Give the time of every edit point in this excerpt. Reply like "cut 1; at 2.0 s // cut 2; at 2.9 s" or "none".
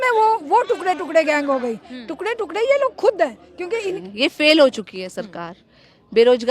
cut 1; at 4.0 s